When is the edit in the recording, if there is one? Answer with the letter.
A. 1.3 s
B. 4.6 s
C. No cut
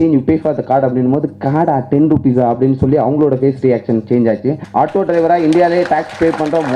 B